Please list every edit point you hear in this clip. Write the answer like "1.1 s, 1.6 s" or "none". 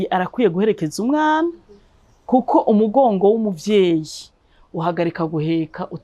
none

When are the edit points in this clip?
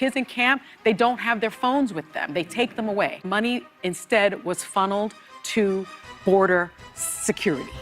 3.2 s

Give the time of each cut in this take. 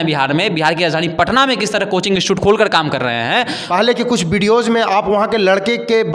3.6 s

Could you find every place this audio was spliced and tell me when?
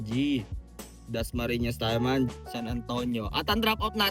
2.3 s

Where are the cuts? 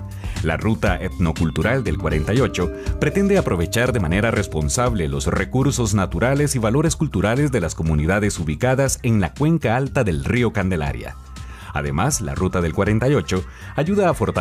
4.6 s

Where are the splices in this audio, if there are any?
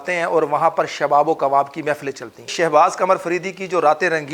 2.5 s

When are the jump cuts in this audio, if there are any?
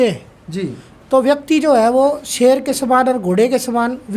none

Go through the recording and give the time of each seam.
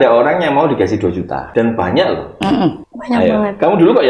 1.4 s, 2.9 s

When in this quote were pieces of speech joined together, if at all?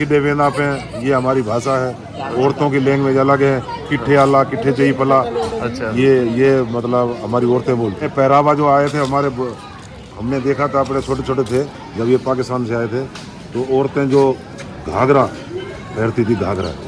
none

